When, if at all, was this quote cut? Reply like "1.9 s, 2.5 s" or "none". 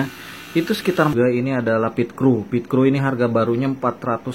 1.1 s